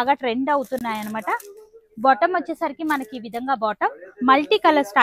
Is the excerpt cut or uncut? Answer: uncut